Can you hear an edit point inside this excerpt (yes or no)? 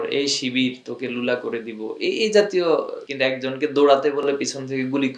yes